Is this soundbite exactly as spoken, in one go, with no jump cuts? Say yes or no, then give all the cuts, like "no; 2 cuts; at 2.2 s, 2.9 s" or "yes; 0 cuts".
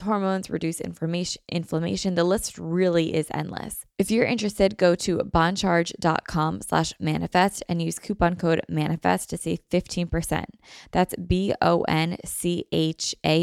no; 1 cut; at 3.8 s